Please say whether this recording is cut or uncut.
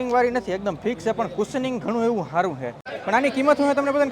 cut